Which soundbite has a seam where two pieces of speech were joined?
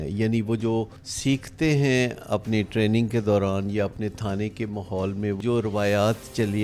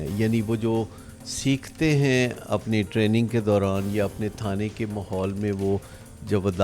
first; 2 cuts; at 1.0 s, 5.4 s

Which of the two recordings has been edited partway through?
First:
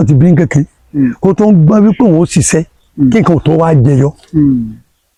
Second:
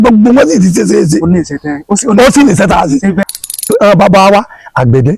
second; 1 cut; at 3.3 s

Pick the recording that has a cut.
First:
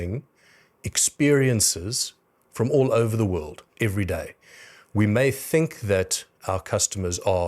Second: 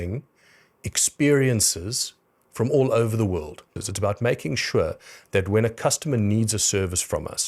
second; 1 cut; at 3.7 s

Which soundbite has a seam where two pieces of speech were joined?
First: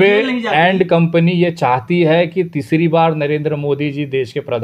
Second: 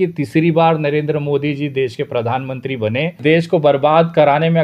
second; 1 cut; at 3.2 s

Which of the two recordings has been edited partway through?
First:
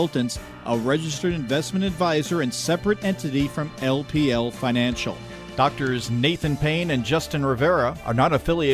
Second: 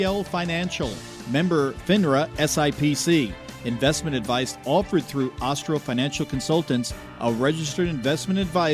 first; 1 cut; at 5.4 s

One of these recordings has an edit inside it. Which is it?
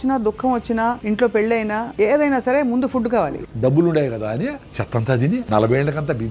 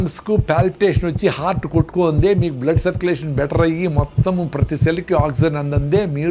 first; 5 cuts; at 1.0 s, 1.9 s, 3.3 s, 4.7 s, 5.4 s

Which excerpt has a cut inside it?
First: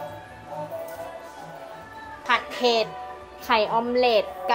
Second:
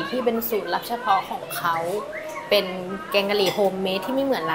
first; 1 cut; at 2.2 s

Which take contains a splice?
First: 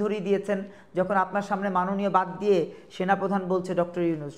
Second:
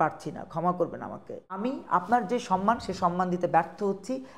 second; 1 cut; at 1.6 s

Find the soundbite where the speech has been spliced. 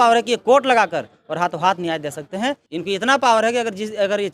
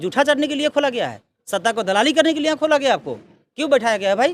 first; 1 cut; at 2.6 s

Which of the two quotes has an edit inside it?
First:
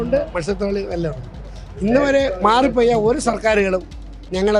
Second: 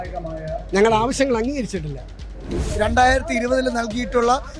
second; 1 cut; at 2.6 s

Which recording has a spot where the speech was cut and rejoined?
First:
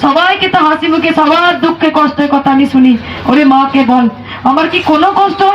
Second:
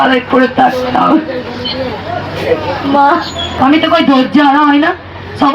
second; 1 cut; at 3.5 s

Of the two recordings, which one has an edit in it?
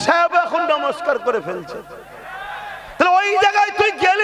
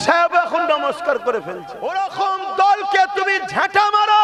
second; 1 cut; at 1.7 s

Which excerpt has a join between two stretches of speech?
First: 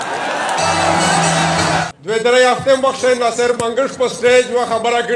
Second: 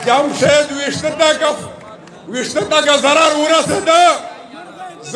first; 1 cut; at 1.8 s

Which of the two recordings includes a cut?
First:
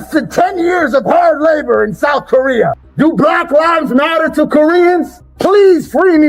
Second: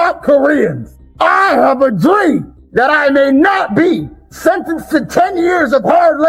first; 2 cuts; at 2.8 s, 5.2 s

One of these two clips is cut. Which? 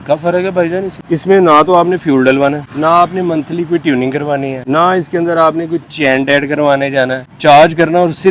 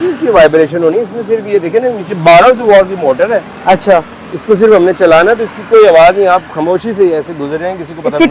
first; 4 cuts; at 1.0 s, 2.7 s, 4.6 s, 7.3 s

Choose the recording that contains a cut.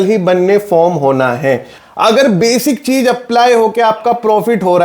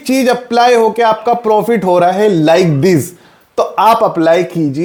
first; 1 cut; at 1.8 s

